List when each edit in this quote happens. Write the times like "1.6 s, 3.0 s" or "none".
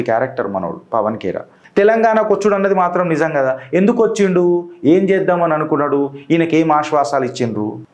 1.5 s